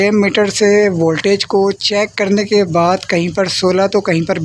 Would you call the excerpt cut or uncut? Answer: uncut